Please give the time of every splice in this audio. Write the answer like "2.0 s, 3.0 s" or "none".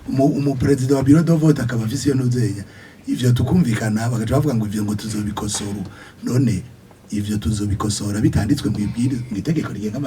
none